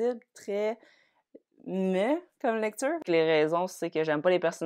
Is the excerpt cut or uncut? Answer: cut